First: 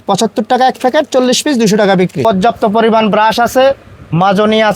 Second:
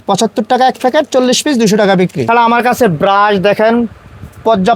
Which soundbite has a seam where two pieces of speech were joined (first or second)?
first